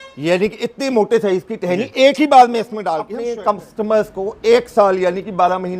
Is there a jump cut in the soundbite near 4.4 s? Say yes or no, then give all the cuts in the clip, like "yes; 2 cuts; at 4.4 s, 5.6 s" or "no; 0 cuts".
no; 1 cut; at 3.1 s